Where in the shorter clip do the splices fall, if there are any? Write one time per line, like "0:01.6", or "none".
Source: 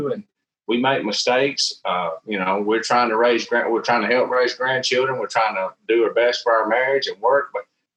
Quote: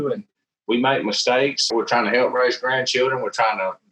0:01.7